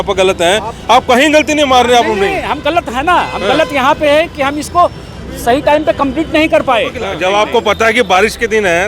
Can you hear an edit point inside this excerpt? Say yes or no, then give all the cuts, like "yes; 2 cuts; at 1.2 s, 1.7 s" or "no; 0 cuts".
yes; 1 cut; at 7.0 s